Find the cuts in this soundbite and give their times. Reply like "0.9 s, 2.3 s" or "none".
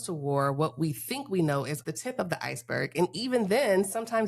1.8 s